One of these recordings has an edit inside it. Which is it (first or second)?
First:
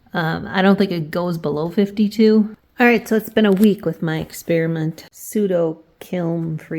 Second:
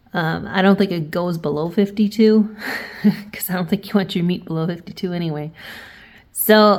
first